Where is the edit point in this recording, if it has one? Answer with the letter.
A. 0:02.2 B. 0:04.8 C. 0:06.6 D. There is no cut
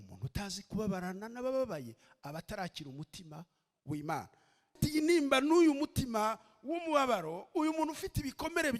B